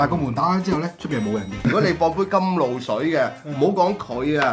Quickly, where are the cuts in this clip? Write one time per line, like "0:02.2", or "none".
0:01.6